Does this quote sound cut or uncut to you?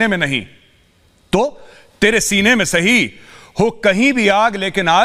uncut